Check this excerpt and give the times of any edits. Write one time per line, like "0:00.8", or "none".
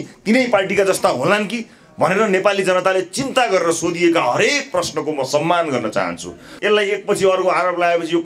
0:06.5